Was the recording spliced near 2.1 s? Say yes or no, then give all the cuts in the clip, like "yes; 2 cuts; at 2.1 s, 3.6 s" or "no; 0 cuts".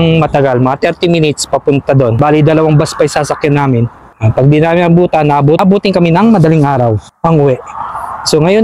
yes; 2 cuts; at 2.1 s, 5.6 s